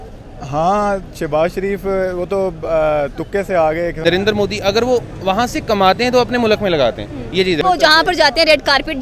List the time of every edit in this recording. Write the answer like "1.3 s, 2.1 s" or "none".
4.0 s, 7.6 s